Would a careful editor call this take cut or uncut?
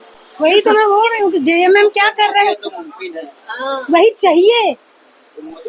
uncut